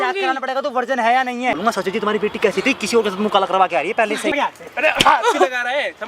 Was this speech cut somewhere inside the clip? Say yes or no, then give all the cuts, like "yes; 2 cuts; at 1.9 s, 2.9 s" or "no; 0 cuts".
yes; 2 cuts; at 1.6 s, 4.3 s